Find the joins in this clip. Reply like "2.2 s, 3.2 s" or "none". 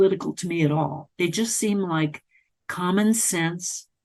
none